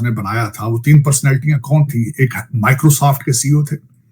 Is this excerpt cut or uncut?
uncut